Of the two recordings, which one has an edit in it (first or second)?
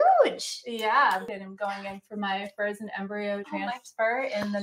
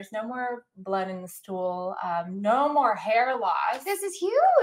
first